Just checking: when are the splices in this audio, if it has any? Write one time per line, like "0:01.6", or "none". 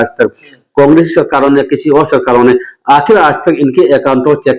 none